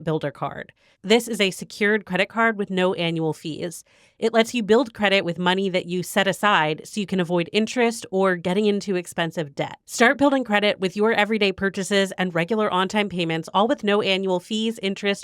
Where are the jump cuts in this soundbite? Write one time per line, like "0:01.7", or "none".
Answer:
none

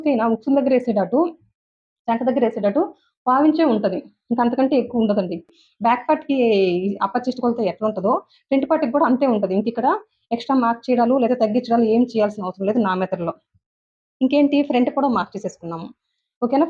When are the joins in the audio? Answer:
0:05.6

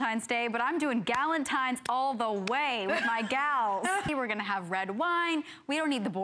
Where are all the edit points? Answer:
0:04.1

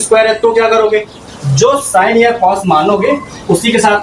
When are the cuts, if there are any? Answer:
0:01.2

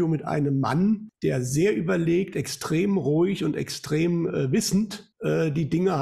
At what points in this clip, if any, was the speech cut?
0:01.1
0:05.1

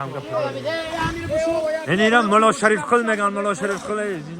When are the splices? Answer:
none

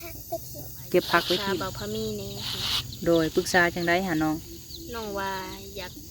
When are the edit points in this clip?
0:01.5

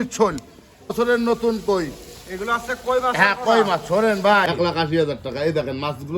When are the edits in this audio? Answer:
0:00.9
0:04.4

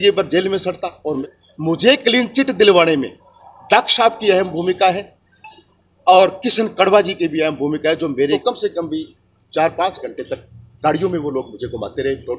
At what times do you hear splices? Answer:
0:01.2
0:08.4

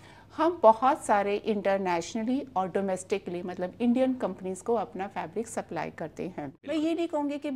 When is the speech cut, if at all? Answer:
0:06.6

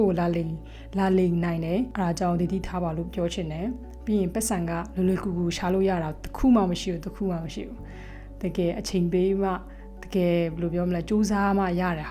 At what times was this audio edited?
0:01.9

